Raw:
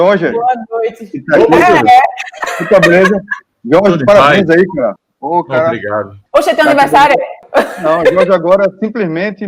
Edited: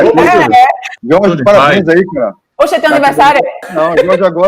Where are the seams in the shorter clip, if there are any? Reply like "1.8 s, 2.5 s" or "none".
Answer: 0.9 s, 2.4 s, 3.7 s